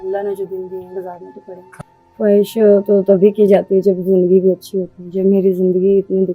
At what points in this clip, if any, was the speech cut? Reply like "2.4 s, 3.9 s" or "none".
1.7 s